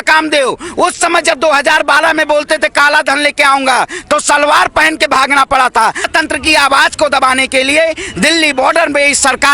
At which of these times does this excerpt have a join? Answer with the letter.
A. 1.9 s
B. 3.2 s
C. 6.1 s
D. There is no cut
C